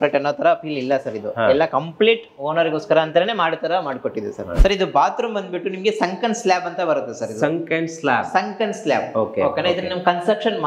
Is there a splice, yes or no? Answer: yes